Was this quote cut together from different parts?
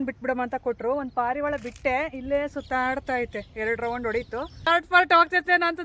yes; 1 cut; at 4.7 s

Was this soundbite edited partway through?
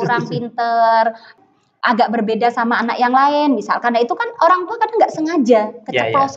yes; 1 cut; at 1.3 s

